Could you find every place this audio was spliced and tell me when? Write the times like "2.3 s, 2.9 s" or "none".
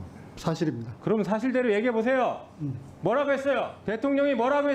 3.8 s